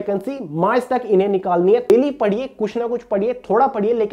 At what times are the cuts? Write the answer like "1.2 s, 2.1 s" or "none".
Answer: 1.9 s